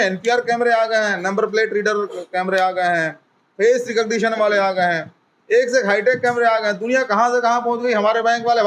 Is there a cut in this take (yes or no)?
no